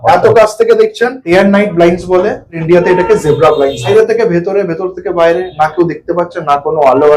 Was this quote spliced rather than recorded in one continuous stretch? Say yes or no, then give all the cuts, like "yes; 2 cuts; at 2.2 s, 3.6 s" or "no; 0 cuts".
yes; 3 cuts; at 1.2 s, 2.6 s, 3.9 s